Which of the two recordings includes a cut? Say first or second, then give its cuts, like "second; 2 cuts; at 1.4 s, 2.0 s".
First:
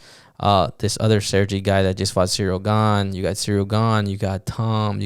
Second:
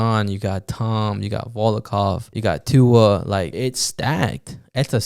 second; 2 cuts; at 2.3 s, 3.5 s